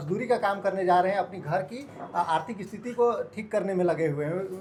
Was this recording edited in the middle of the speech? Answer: no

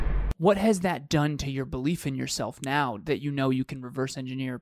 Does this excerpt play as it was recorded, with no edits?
yes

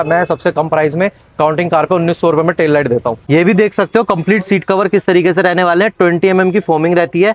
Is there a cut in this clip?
yes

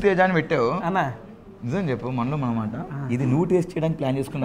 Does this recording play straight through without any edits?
yes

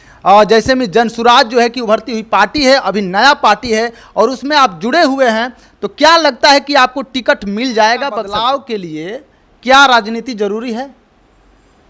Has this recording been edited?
yes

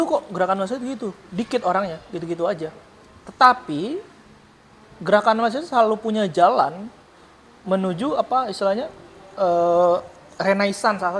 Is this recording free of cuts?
yes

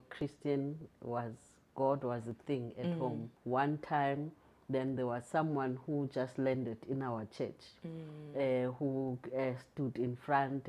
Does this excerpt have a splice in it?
yes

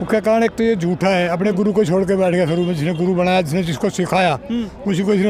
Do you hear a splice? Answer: no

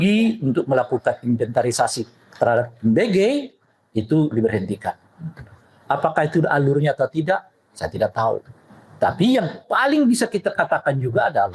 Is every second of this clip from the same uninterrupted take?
yes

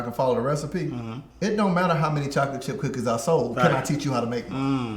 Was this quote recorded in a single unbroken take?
yes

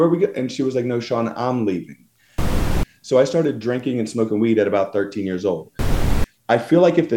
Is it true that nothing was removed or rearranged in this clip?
no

